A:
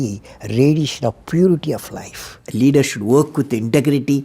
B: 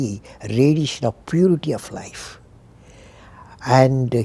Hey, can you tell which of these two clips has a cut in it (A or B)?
A